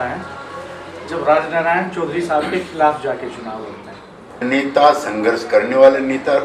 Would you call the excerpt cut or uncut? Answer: cut